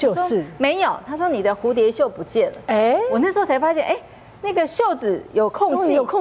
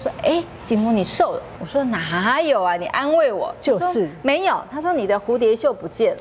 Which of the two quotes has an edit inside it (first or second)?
second